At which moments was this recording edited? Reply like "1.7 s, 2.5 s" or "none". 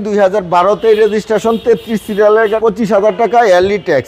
2.6 s